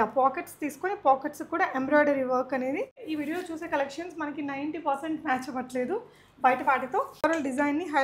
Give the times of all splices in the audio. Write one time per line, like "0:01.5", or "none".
0:03.0
0:07.2